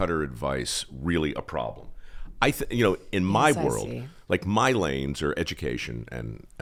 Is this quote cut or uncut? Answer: uncut